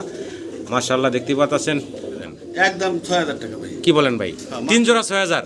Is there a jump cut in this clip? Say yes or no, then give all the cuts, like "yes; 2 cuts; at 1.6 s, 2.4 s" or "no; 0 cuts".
yes; 1 cut; at 2.2 s